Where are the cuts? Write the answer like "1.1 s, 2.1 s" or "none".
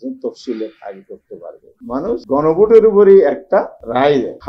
1.8 s